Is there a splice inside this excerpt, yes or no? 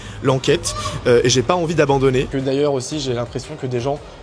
yes